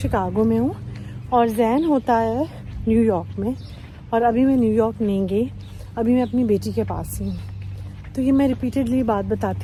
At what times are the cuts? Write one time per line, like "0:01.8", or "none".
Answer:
none